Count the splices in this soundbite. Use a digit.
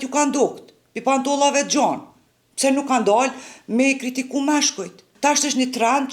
1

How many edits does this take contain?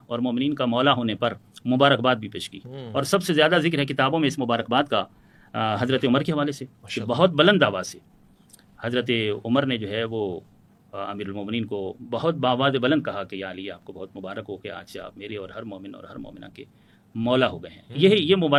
0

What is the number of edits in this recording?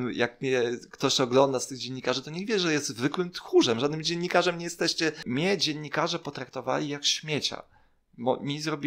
1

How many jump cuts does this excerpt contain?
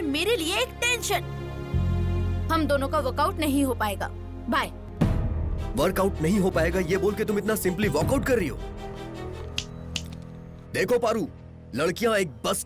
2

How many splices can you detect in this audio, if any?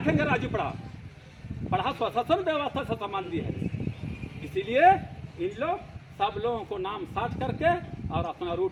0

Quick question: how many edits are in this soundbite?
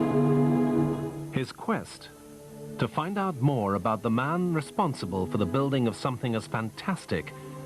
1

